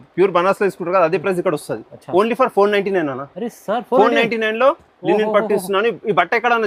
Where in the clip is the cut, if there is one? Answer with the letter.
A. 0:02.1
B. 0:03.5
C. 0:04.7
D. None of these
D